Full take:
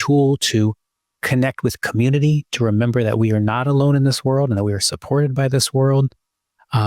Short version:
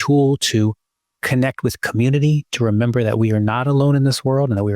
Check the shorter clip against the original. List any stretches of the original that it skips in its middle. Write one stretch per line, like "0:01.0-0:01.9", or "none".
none